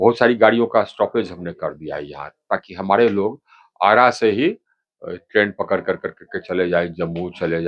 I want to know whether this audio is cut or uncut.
uncut